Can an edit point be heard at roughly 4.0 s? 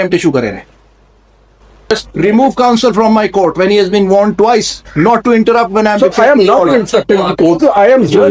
no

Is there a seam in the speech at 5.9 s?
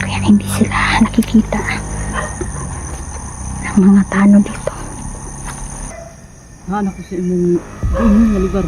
yes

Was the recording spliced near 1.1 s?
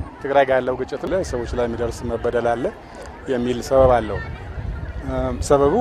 yes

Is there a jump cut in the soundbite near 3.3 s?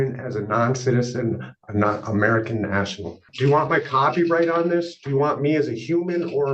yes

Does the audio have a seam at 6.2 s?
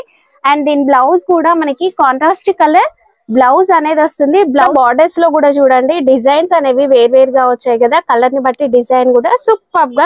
no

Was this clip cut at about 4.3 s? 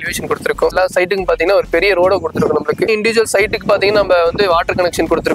no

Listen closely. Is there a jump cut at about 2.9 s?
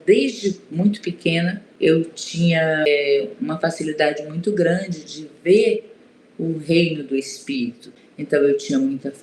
yes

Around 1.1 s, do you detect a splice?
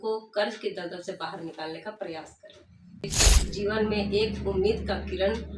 no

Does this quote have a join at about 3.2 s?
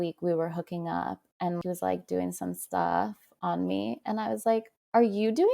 no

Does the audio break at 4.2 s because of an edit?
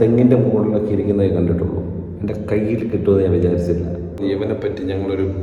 yes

